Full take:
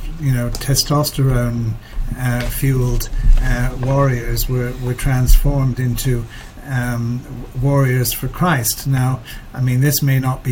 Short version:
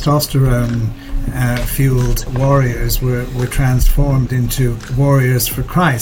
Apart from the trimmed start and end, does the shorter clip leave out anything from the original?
yes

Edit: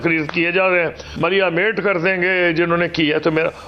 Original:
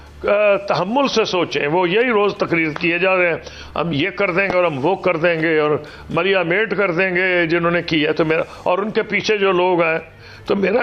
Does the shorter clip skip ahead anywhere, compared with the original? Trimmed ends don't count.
yes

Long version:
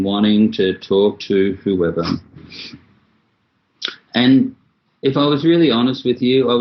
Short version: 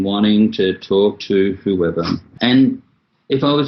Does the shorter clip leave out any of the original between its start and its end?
yes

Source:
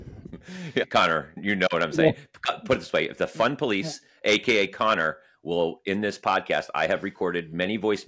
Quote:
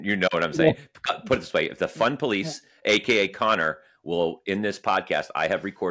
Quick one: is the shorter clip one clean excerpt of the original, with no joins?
yes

